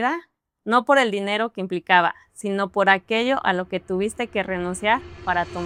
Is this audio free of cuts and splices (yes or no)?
yes